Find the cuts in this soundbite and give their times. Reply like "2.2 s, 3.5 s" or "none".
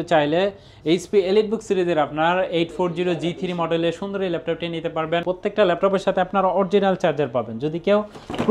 5.2 s